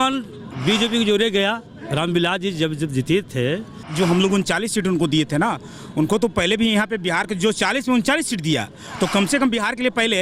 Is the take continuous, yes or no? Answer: no